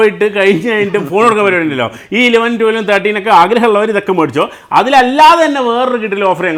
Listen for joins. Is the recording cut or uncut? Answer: uncut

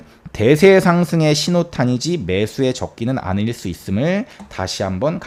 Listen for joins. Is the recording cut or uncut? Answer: uncut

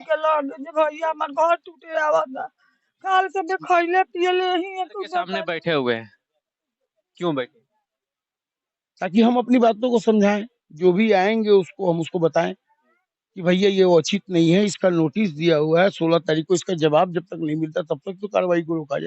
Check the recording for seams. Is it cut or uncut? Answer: cut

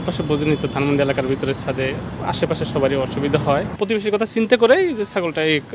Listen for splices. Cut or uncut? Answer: cut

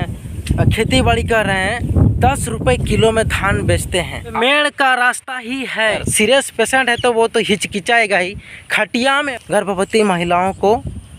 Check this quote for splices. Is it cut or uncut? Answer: cut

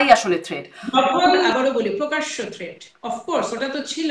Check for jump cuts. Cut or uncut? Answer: cut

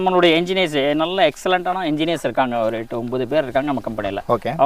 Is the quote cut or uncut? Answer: uncut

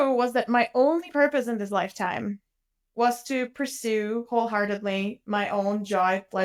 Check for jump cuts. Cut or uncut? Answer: uncut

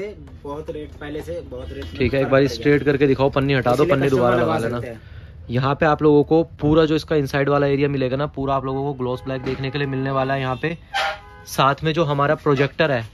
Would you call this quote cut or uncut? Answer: uncut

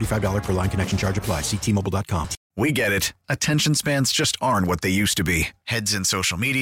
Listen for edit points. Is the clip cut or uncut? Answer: cut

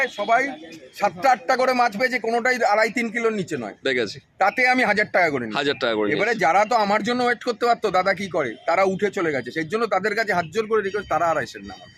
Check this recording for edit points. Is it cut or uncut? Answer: uncut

